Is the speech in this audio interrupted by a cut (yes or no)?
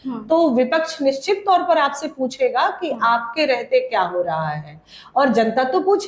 no